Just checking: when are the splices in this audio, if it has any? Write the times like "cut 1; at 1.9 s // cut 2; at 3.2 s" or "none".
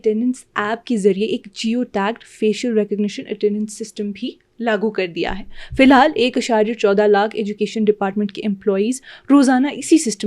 none